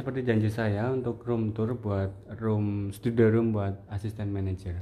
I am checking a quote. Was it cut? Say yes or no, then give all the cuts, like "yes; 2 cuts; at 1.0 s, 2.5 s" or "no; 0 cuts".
no; 0 cuts